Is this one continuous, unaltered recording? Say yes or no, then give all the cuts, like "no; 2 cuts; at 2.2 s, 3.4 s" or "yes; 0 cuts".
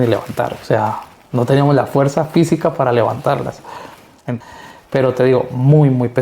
no; 1 cut; at 4.3 s